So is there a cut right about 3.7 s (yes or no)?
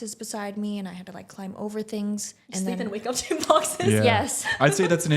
no